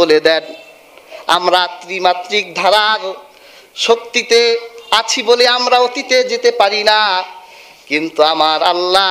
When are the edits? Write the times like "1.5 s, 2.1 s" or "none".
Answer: none